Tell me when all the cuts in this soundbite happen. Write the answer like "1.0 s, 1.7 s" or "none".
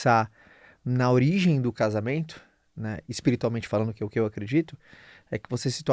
none